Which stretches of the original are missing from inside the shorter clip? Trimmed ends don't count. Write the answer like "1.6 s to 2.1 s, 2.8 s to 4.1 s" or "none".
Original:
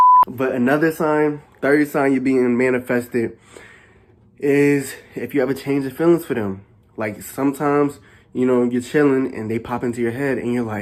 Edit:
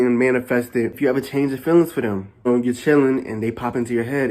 3.3 s to 5.3 s, 6.8 s to 8.5 s